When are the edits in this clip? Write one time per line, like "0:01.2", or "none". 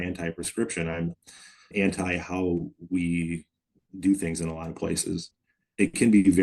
0:01.7